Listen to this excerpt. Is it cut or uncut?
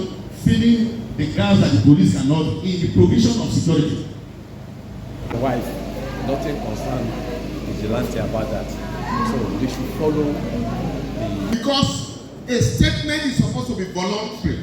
cut